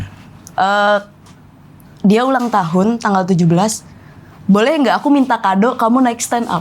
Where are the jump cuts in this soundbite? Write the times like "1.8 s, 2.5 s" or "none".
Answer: none